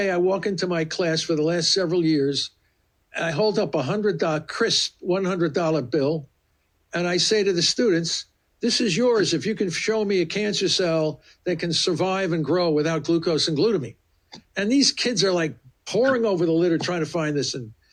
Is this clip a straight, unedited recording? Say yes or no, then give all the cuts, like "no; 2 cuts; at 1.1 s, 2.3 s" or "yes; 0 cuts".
yes; 0 cuts